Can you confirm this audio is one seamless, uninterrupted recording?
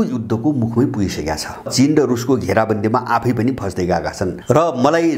no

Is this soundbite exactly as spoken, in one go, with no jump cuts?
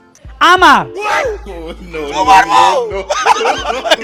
yes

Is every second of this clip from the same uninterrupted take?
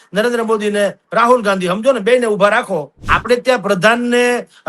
no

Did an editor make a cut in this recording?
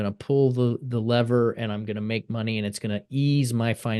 no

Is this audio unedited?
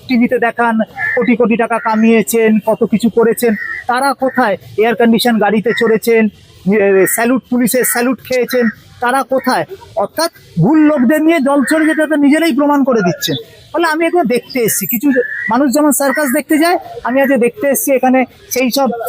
yes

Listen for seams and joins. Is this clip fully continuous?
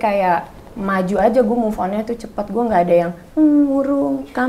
yes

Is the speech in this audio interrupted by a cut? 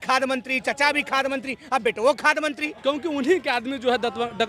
yes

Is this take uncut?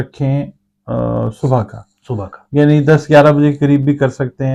yes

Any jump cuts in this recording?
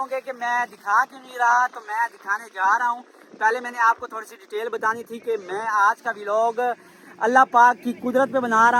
no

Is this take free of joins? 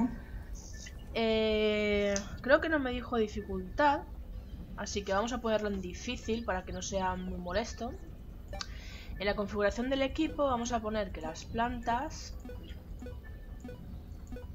no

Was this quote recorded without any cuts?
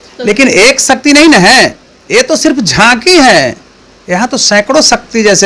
yes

